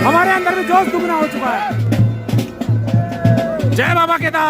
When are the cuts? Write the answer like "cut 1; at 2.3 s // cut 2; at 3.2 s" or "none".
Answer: cut 1; at 1.8 s